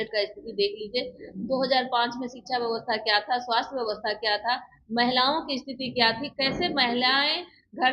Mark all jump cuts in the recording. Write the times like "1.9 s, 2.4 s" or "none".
none